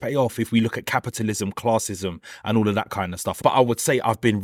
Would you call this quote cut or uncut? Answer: uncut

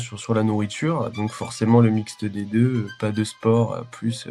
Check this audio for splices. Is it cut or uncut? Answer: uncut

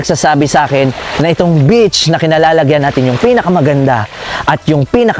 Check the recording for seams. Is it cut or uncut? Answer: uncut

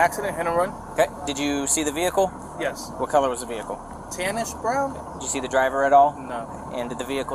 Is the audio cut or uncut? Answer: uncut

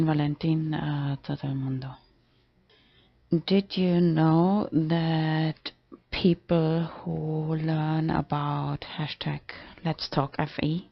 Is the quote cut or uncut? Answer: cut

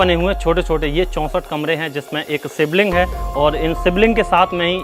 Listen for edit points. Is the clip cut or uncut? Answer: uncut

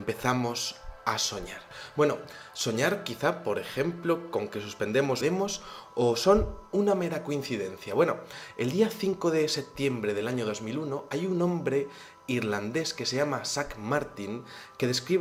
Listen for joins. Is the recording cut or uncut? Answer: uncut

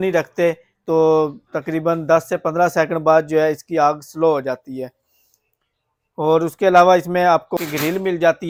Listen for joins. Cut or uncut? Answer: uncut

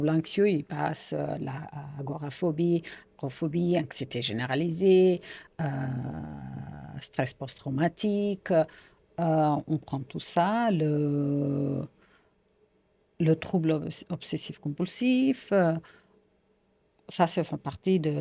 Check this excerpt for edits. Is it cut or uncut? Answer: uncut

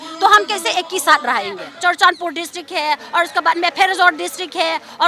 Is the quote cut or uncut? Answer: cut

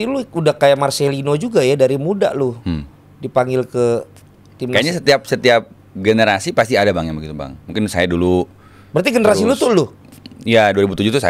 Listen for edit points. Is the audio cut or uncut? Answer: uncut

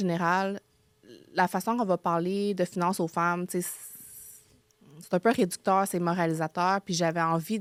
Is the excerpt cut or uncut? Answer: uncut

